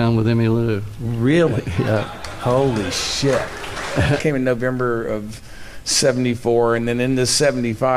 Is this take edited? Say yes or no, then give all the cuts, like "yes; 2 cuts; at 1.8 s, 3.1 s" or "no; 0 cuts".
no; 0 cuts